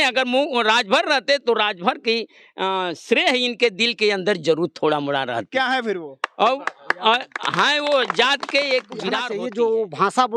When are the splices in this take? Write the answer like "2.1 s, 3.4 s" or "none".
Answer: 9.2 s